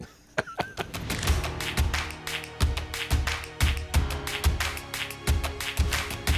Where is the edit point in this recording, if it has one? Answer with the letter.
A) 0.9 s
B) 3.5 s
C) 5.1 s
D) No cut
A